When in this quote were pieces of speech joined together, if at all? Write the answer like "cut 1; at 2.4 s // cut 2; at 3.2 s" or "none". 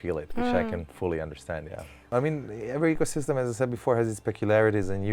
cut 1; at 2.0 s